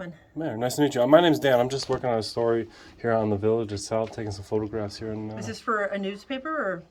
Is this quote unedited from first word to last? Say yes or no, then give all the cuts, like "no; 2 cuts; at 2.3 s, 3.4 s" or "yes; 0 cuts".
yes; 0 cuts